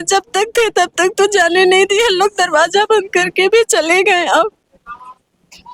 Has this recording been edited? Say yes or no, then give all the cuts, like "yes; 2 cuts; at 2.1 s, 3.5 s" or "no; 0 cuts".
no; 0 cuts